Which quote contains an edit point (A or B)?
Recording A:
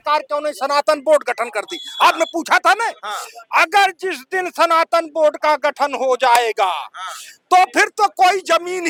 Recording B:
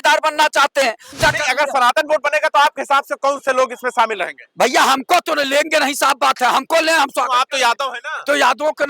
B